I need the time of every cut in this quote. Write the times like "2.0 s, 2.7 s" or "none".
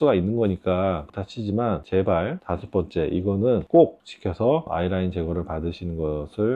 4.7 s